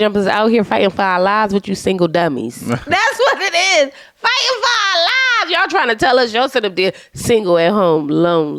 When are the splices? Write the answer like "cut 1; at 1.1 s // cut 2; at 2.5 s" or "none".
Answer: none